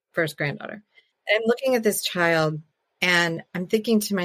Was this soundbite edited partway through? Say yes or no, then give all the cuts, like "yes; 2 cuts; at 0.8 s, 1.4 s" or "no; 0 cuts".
yes; 1 cut; at 1.1 s